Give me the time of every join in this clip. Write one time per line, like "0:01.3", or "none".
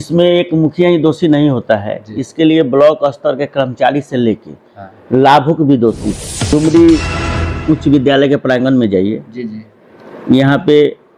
0:06.5